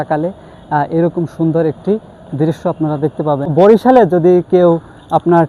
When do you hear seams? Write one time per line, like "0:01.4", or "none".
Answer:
0:03.5